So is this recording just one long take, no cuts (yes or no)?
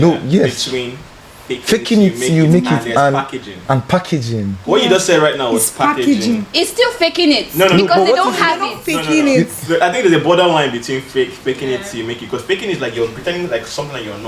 yes